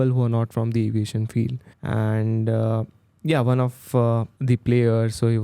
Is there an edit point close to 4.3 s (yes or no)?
yes